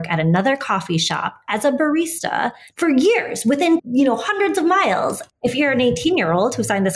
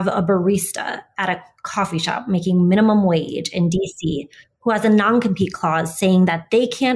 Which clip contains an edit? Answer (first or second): first